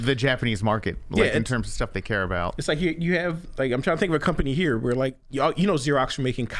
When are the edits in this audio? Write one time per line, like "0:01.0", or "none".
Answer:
0:05.2

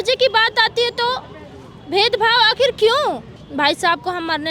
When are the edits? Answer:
0:03.4

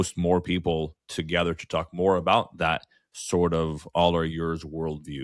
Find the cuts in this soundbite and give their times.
none

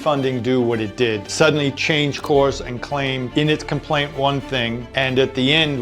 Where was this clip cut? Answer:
0:01.3
0:03.3
0:04.8

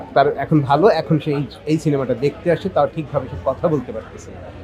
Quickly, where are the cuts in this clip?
none

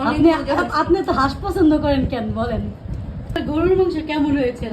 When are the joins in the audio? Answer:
0:03.4

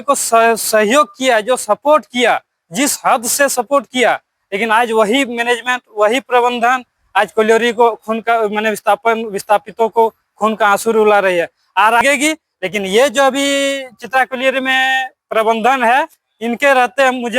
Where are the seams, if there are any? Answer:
0:12.0

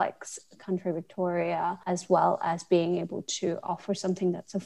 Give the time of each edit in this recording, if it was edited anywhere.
0:01.8

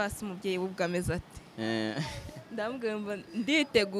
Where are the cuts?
none

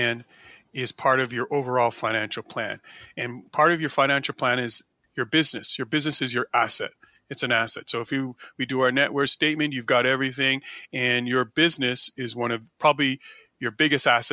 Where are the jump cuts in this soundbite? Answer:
0:04.9

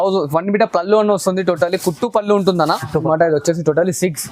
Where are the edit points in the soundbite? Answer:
0:03.0

